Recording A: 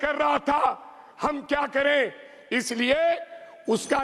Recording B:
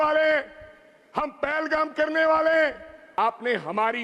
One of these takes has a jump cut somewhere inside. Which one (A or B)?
B